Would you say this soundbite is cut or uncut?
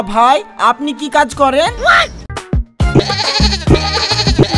cut